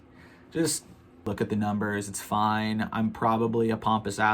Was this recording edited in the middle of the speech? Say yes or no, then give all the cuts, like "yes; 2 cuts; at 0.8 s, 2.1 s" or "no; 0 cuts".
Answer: yes; 1 cut; at 0.9 s